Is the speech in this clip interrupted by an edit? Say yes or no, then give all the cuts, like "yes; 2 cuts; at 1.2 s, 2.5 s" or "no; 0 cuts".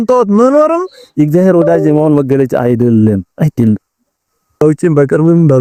no; 0 cuts